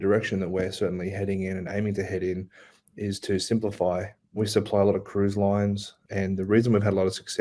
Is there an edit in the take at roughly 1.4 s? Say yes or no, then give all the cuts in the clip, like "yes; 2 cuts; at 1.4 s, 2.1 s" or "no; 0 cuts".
no; 2 cuts; at 4.4 s, 5.9 s